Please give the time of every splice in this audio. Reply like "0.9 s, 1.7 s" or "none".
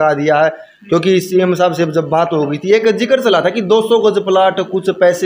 none